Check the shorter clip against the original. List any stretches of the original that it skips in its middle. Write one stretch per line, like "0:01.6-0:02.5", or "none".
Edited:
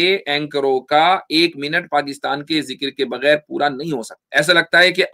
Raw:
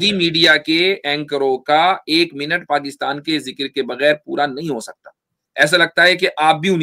0:04.9-0:05.4